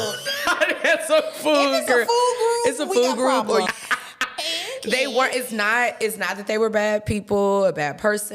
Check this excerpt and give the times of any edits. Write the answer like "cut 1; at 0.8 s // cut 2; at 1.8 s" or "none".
cut 1; at 3.7 s